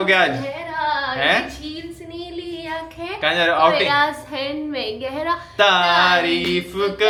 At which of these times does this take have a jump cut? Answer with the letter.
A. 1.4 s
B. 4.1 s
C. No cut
C